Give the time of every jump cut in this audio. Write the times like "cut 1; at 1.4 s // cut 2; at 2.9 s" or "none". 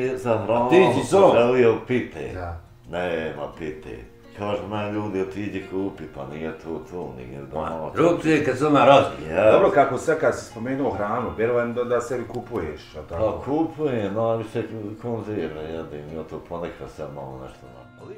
none